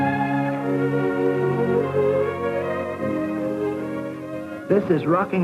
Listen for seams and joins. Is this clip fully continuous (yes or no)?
no